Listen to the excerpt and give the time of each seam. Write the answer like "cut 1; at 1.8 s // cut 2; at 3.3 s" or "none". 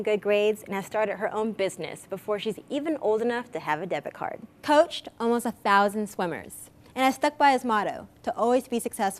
cut 1; at 4.6 s